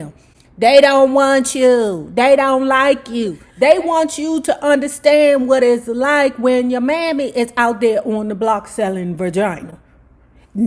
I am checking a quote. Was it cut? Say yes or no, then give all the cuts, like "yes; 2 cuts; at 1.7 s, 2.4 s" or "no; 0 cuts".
no; 0 cuts